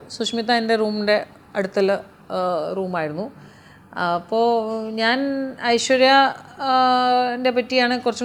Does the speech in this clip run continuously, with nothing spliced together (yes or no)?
yes